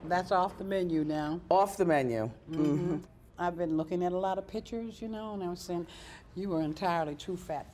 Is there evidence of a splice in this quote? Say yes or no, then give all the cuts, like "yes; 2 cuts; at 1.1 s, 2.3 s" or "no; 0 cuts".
no; 0 cuts